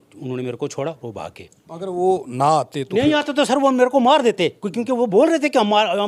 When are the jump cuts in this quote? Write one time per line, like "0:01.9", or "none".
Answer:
none